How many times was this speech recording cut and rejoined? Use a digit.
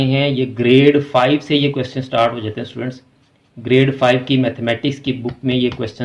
0